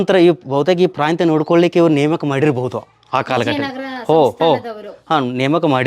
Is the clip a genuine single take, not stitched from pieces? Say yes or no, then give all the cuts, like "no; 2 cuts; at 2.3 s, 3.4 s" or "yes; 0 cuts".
yes; 0 cuts